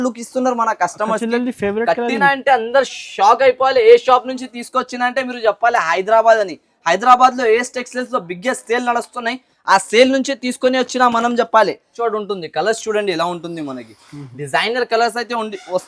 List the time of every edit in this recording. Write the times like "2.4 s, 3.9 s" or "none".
12.0 s